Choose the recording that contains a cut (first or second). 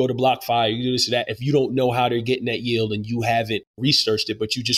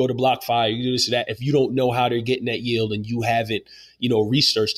first